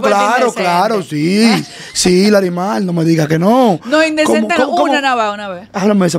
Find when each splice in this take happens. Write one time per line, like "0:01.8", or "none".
none